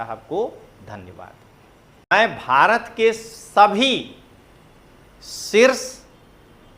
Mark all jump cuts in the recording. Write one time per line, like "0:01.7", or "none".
0:02.1